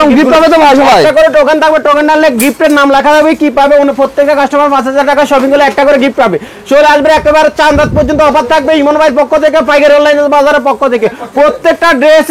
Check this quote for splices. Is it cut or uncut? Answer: uncut